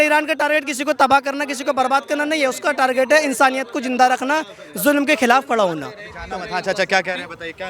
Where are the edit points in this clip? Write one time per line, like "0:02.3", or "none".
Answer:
none